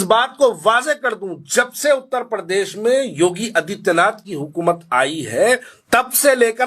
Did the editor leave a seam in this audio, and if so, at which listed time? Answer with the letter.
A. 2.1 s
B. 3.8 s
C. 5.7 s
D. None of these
C